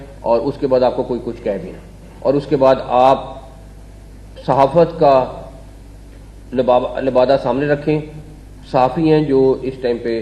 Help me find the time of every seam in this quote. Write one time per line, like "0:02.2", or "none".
none